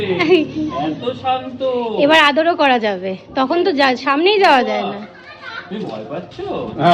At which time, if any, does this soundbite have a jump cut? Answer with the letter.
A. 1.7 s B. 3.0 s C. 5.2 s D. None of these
D